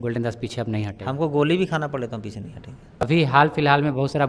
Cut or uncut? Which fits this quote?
cut